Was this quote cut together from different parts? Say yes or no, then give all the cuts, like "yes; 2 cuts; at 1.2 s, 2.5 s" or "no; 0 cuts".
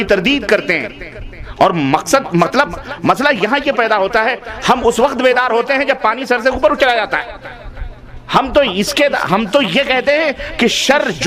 no; 0 cuts